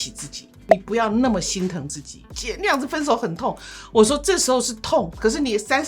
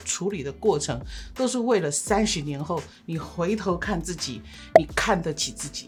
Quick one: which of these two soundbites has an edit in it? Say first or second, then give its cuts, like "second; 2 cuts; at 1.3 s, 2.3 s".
first; 1 cut; at 2.2 s